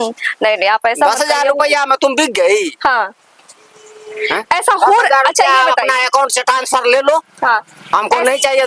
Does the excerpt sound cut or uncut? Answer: uncut